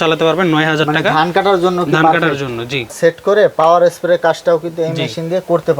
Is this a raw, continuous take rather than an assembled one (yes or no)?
no